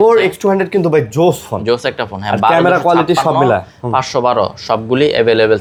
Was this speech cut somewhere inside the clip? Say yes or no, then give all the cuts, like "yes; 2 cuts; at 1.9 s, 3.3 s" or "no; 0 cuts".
no; 0 cuts